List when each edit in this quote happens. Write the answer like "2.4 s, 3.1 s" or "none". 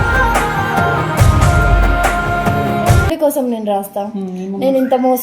3.1 s

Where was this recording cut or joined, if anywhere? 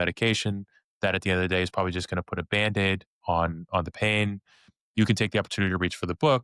none

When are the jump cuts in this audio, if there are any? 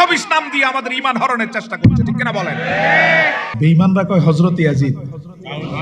3.5 s

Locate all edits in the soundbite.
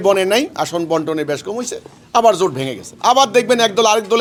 none

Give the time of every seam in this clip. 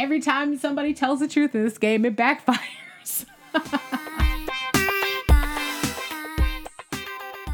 4.1 s

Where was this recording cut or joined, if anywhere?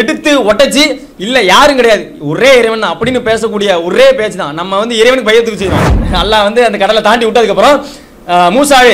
5.9 s

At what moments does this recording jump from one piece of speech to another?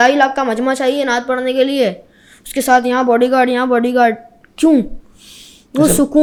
none

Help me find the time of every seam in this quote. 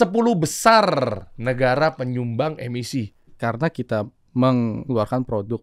1.3 s, 3.3 s, 4.8 s

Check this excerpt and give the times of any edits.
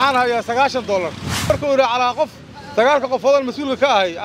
1.5 s

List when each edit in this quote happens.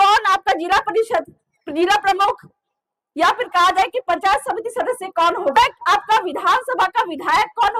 5.6 s

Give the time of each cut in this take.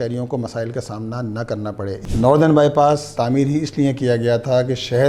2.0 s, 3.1 s

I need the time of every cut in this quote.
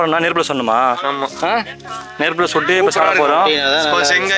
none

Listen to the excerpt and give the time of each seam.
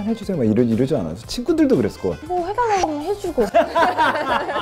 2.2 s

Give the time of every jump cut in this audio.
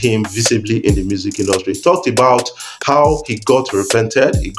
none

